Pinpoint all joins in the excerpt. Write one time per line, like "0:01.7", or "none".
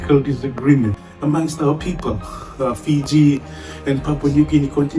0:01.1